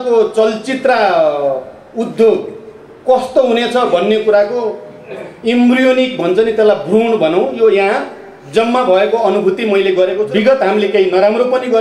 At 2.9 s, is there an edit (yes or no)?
no